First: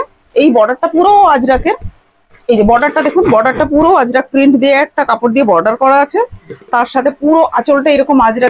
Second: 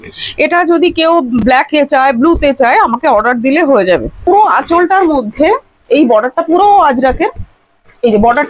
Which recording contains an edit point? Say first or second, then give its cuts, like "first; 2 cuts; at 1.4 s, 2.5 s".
second; 1 cut; at 4.3 s